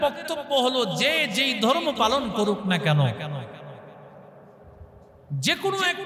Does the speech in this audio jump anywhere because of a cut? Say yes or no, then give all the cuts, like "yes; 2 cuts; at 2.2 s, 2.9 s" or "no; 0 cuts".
no; 0 cuts